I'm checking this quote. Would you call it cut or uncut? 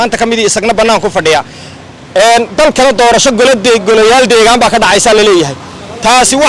uncut